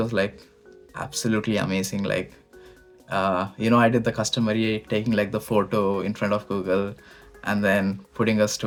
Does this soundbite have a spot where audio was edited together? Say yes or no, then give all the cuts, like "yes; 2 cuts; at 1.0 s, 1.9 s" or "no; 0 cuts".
no; 0 cuts